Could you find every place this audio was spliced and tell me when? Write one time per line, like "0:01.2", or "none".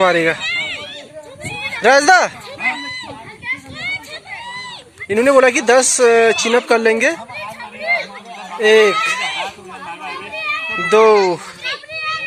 none